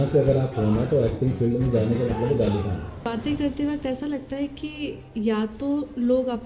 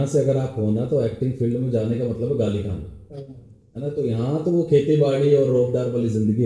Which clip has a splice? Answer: first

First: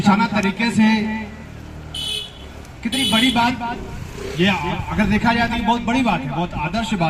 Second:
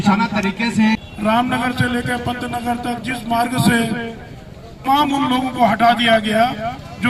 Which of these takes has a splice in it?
second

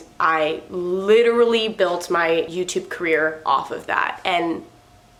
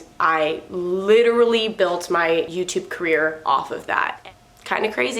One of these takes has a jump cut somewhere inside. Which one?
second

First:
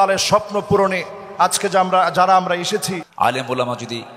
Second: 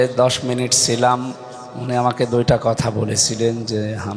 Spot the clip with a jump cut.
first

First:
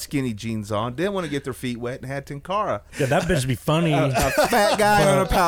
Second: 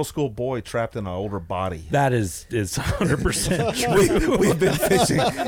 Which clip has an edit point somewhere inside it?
first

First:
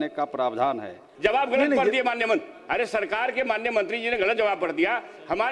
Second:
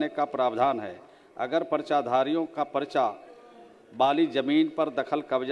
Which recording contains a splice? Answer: first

